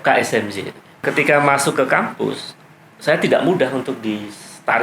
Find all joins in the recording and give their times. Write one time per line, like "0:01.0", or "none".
0:01.0

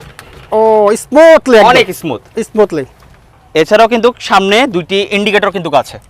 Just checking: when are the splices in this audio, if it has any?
none

